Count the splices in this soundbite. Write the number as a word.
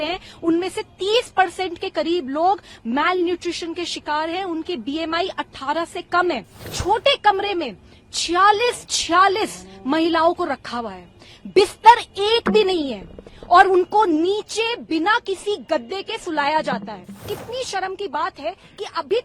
two